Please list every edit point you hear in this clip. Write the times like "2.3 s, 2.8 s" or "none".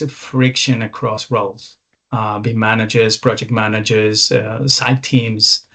none

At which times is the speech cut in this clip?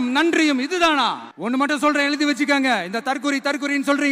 1.3 s

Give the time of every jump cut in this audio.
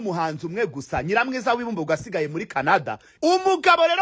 3.0 s

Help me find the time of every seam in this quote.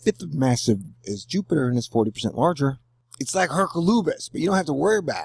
none

